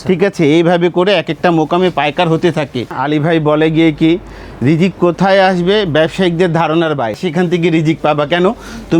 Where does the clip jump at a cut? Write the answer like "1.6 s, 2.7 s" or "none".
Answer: 3.0 s, 7.2 s